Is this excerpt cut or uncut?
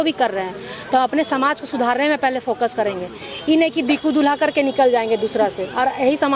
uncut